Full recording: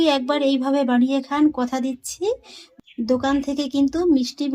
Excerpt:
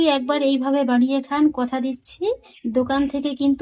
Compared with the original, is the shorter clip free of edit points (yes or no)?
no